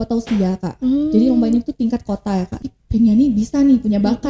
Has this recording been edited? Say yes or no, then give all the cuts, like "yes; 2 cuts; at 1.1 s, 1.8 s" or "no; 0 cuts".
yes; 1 cut; at 2.5 s